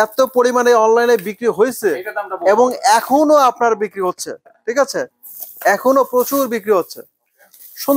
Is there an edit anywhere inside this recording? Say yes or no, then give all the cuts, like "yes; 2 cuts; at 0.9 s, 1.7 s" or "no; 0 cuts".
no; 0 cuts